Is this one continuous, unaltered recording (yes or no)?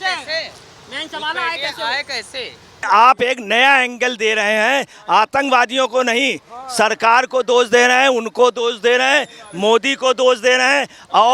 no